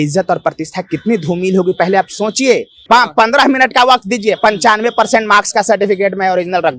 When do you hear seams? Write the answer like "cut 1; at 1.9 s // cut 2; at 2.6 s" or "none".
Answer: cut 1; at 2.7 s